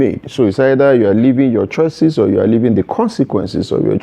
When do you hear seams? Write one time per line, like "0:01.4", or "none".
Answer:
none